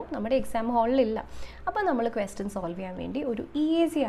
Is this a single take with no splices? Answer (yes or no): yes